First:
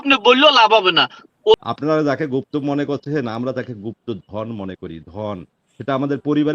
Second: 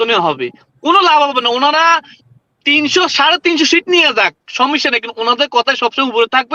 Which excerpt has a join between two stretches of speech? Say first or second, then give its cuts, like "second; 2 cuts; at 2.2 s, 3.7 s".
first; 1 cut; at 1.6 s